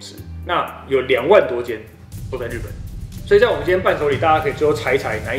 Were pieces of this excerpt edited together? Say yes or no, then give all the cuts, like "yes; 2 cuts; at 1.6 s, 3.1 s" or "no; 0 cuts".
no; 0 cuts